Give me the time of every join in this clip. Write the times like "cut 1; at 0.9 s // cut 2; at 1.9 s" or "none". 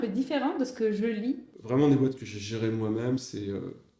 cut 1; at 1.5 s